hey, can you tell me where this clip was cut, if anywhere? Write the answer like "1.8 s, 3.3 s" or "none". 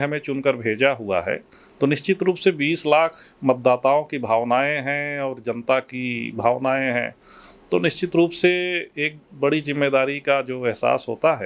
none